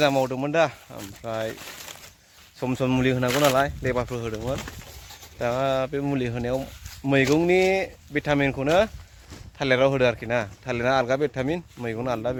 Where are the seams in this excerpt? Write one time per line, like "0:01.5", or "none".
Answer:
none